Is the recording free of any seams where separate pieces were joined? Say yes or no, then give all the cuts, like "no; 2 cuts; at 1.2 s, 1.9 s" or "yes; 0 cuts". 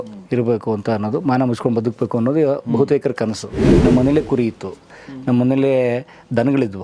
no; 1 cut; at 3.7 s